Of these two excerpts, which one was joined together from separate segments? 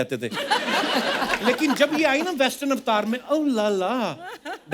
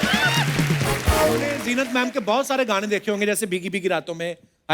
second; 1 cut; at 1.6 s

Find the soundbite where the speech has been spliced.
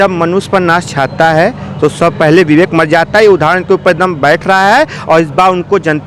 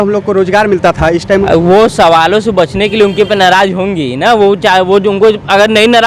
second; 1 cut; at 1.4 s

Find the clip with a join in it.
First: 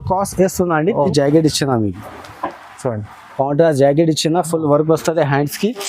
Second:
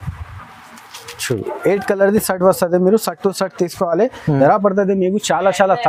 first; 1 cut; at 1.1 s

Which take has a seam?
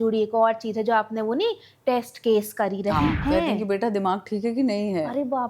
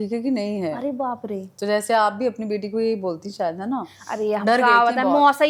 first; 1 cut; at 3.2 s

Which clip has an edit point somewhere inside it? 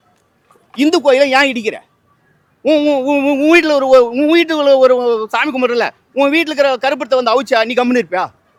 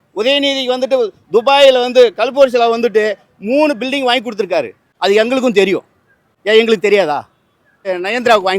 second; 2 cuts; at 4.9 s, 7.9 s

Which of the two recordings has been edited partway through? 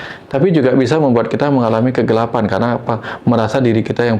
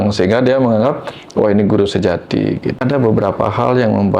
second; 1 cut; at 2.8 s

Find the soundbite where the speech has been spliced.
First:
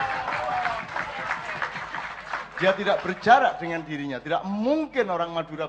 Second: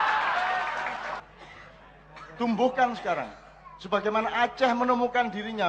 second; 1 cut; at 1.2 s

